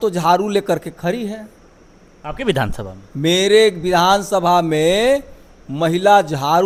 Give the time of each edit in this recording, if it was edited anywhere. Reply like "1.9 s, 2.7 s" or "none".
none